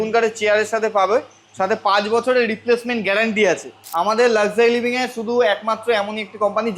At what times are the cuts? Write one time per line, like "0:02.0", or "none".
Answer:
0:03.8